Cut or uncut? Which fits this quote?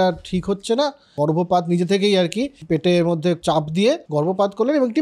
cut